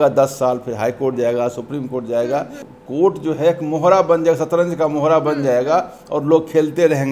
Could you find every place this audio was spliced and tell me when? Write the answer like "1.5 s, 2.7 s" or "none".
2.6 s